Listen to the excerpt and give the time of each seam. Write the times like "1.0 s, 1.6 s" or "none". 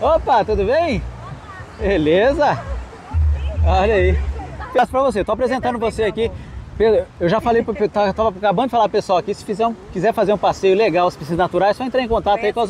4.8 s